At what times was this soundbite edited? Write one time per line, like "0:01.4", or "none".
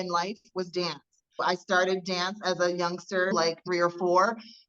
none